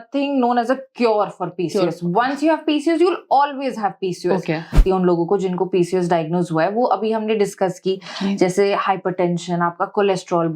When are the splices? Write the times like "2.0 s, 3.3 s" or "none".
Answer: 4.8 s

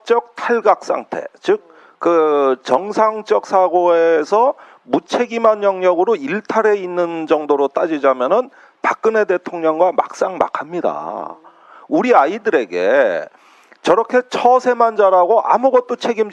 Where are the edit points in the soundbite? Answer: 3.9 s

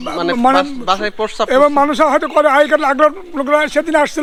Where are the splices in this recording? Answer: none

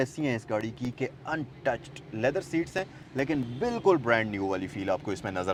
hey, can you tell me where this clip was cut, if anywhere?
none

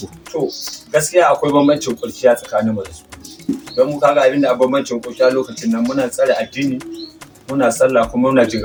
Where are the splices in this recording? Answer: none

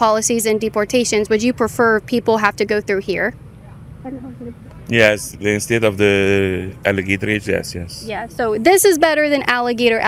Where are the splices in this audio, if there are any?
none

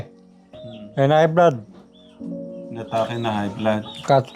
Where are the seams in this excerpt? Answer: none

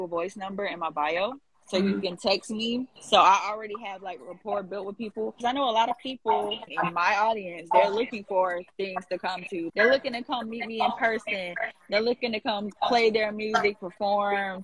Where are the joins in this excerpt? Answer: 5.4 s, 6.6 s, 9.7 s

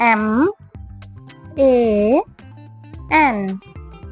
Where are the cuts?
none

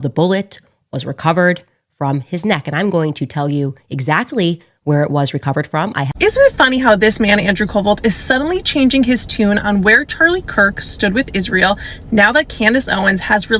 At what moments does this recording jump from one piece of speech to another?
6.1 s

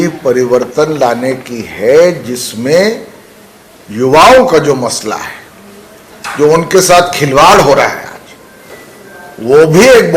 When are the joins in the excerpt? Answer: none

